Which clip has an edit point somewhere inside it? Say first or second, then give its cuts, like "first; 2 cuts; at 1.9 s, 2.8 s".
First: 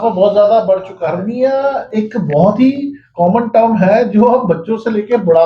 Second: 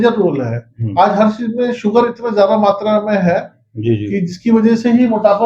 first; 1 cut; at 1.1 s